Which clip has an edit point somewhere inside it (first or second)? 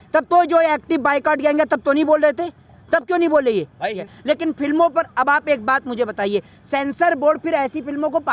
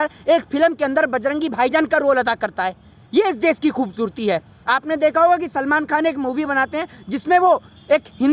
first